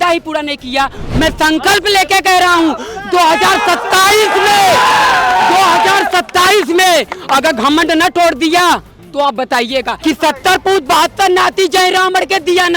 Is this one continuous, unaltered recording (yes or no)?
no